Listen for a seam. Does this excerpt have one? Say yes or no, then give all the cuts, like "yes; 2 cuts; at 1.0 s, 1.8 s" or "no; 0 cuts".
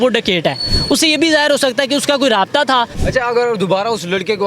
yes; 1 cut; at 3.0 s